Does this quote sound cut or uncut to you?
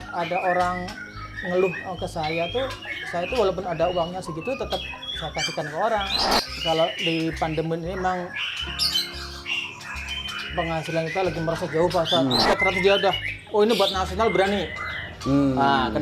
cut